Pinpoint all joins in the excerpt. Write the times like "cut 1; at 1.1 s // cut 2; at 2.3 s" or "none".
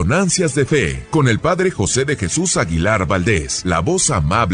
cut 1; at 1.0 s // cut 2; at 3.5 s